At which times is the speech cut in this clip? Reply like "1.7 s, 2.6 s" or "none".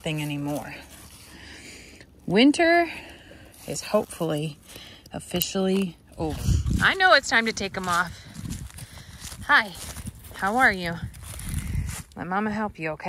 6.4 s

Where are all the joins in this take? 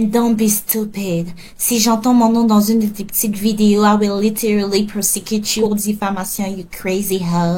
none

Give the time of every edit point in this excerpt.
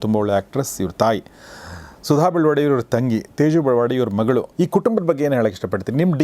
4.5 s

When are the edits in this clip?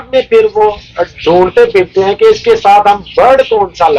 none

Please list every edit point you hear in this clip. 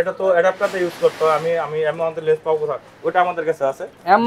none

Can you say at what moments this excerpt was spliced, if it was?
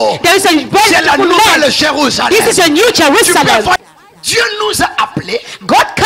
3.8 s

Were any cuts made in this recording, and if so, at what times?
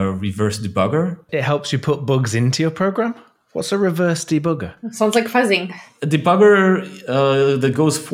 1.2 s

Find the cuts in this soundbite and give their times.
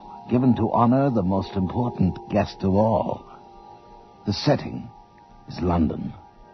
none

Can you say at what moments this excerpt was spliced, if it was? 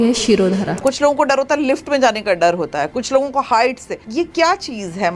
0.8 s, 4.0 s

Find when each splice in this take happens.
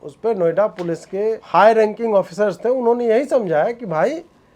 1.4 s

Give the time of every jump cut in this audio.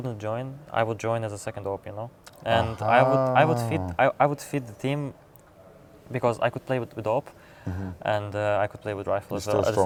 none

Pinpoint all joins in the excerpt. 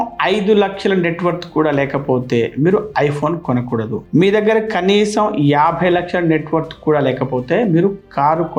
none

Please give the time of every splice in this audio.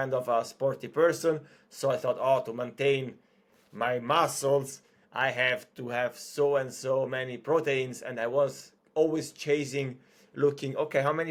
none

